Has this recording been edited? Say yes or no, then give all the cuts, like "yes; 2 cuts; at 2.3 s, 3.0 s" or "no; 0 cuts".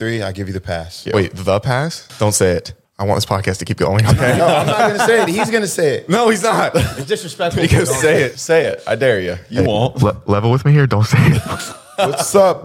yes; 4 cuts; at 1.0 s, 2.0 s, 6.9 s, 8.4 s